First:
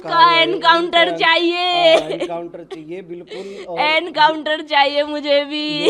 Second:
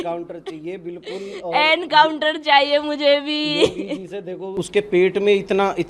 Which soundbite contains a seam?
second; 1 cut; at 4.6 s

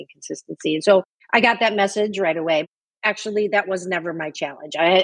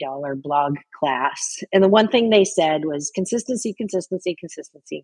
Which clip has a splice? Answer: first; 2 cuts; at 1.1 s, 2.7 s

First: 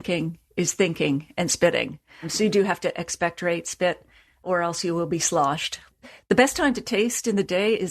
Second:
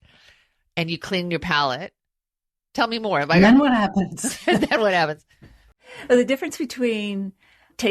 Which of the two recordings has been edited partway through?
first; 2 cuts; at 4.4 s, 5.8 s

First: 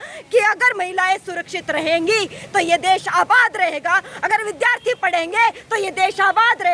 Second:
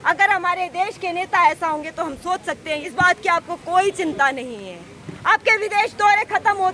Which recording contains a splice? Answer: second; 1 cut; at 2.9 s

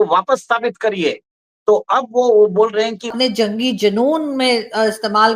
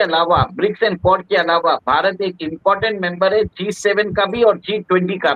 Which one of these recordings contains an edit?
first; 1 cut; at 3.1 s

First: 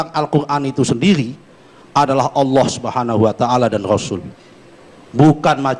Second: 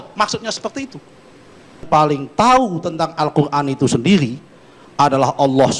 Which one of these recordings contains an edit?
second; 1 cut; at 1.8 s

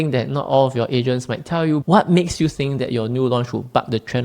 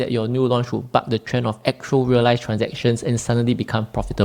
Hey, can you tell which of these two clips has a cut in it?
first; 1 cut; at 1.8 s

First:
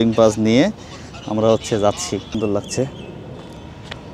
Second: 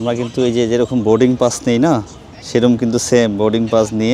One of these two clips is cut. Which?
first; 1 cut; at 2.3 s

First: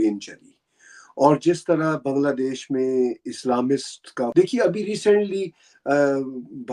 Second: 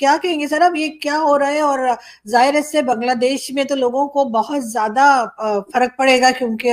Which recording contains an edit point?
first; 1 cut; at 4.3 s

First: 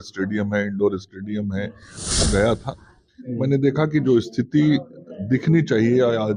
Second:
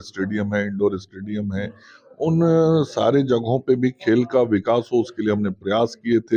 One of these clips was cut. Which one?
first; 1 cut; at 2.2 s

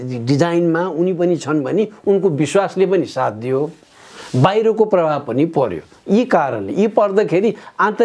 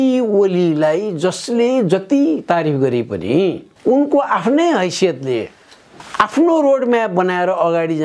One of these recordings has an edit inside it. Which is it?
second; 2 cuts; at 3.7 s, 5.8 s

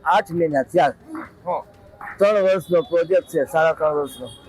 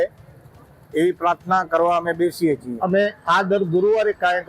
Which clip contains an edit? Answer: second; 1 cut; at 2.7 s

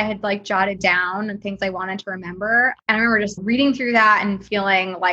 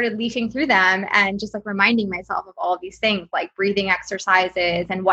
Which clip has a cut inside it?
first; 1 cut; at 3.4 s

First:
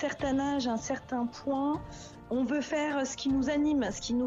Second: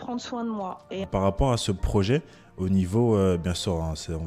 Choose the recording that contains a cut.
second; 1 cut; at 1.1 s

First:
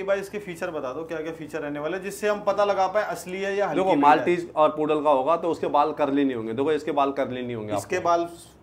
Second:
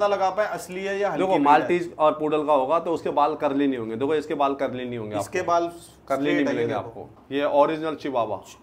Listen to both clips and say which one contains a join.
second; 1 cut; at 7.2 s

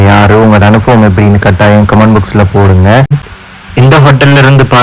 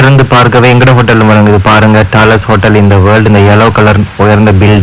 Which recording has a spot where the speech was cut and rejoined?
first; 1 cut; at 3.2 s

